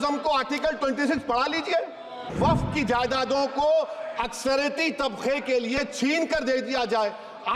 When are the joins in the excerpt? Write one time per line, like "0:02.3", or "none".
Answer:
0:02.3